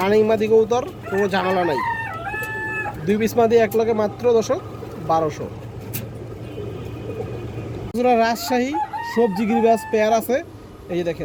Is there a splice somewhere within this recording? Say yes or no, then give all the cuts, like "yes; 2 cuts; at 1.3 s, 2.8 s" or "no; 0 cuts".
no; 0 cuts